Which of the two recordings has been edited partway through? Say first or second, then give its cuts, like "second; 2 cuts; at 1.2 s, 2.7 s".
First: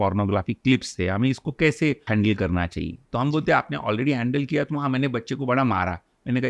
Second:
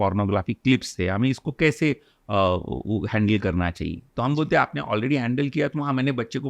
first; 1 cut; at 2.0 s